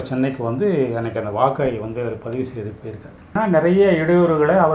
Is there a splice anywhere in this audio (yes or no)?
yes